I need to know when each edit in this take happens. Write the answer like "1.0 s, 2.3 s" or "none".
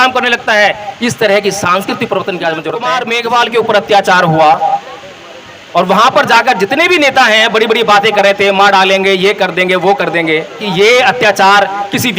2.9 s, 10.7 s